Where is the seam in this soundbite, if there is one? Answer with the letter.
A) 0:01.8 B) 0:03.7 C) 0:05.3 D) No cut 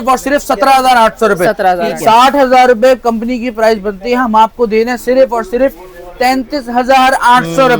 A